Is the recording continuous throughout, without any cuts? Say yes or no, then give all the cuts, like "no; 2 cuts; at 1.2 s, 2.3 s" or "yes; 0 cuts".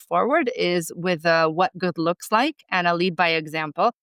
yes; 0 cuts